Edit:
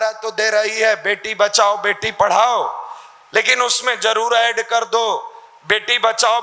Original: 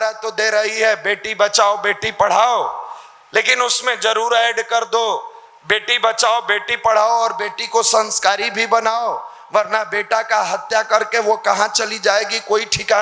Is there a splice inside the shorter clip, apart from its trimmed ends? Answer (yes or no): no